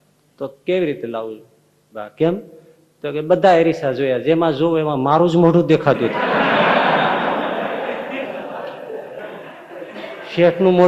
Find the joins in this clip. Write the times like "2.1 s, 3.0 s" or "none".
none